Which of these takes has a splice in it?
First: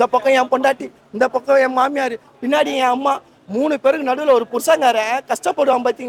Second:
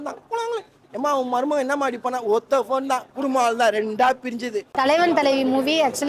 second; 1 cut; at 4.6 s

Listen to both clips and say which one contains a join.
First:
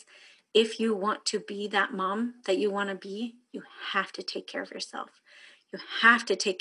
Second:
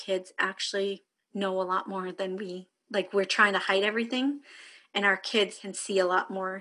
second; 2 cuts; at 1.1 s, 5.7 s

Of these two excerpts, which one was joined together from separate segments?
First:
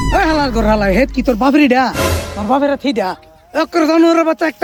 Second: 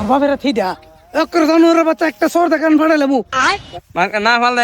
second; 1 cut; at 3.7 s

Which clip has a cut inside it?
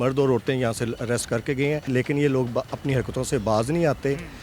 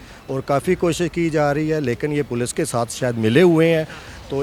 first; 1 cut; at 1.9 s

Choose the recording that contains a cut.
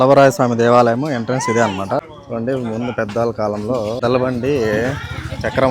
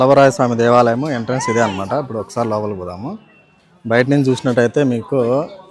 first; 2 cuts; at 2.1 s, 4.0 s

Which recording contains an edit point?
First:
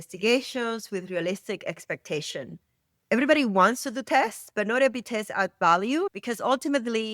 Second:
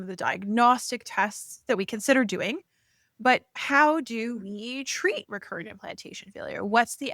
first; 1 cut; at 6.1 s

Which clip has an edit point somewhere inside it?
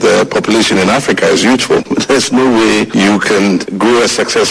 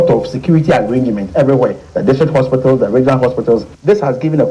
first; 1 cut; at 1.9 s

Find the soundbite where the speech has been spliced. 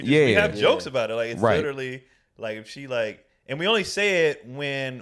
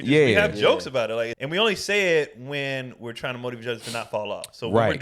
second; 1 cut; at 1.3 s

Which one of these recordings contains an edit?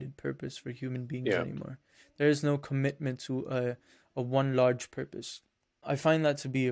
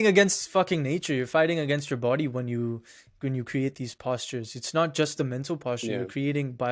first; 1 cut; at 5.8 s

